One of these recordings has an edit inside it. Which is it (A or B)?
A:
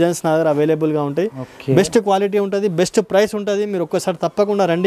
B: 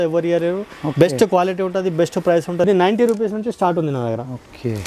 B